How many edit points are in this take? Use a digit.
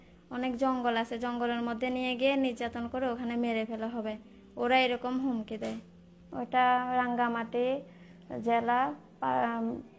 1